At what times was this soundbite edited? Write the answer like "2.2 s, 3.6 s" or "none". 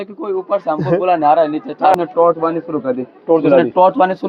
1.9 s